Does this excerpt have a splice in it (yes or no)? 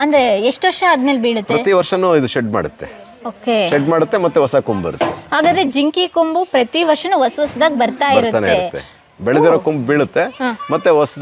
no